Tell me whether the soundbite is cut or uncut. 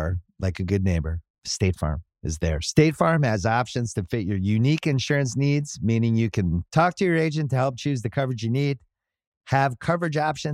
uncut